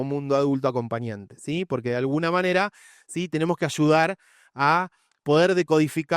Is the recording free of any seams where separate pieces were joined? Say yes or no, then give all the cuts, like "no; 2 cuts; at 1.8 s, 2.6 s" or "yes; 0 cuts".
yes; 0 cuts